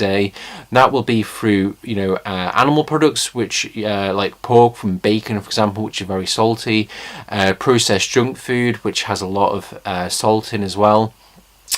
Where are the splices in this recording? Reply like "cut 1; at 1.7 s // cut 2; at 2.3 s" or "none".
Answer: cut 1; at 2.9 s